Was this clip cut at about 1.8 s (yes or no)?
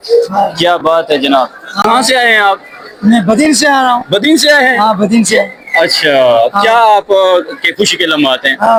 no